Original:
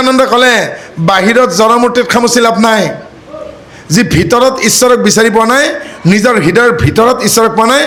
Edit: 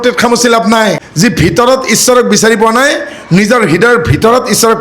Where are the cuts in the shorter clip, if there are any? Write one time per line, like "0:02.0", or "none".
0:01.1